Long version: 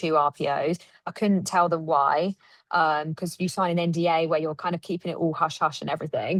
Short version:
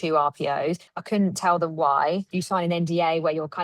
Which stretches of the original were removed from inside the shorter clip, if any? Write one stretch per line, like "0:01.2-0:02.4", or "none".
0:00.9-0:01.0
0:02.4-0:03.4